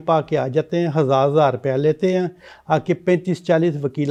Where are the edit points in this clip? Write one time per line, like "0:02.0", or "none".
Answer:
none